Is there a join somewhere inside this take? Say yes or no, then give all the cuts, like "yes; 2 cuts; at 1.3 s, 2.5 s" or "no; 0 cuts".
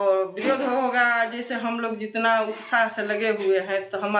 no; 0 cuts